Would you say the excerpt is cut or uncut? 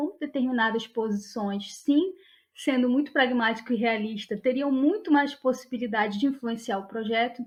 uncut